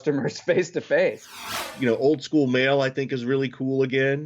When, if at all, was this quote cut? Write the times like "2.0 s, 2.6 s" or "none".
1.5 s